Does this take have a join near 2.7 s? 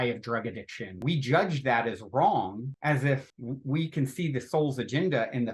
yes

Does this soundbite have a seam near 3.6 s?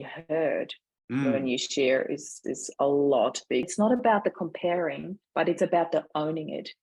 yes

